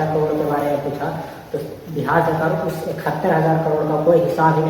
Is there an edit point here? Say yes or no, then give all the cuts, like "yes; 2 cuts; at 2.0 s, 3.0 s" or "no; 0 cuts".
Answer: no; 0 cuts